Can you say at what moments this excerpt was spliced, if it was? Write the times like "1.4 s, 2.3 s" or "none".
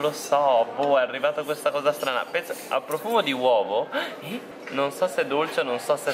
none